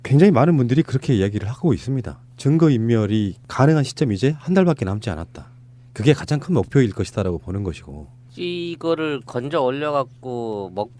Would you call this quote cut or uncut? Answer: cut